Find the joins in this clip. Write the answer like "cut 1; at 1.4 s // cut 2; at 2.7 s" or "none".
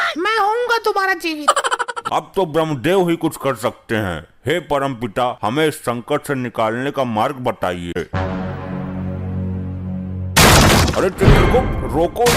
cut 1; at 2.0 s // cut 2; at 8.0 s